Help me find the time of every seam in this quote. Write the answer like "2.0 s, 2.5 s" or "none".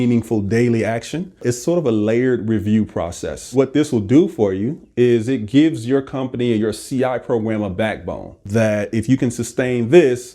1.4 s, 3.5 s, 8.4 s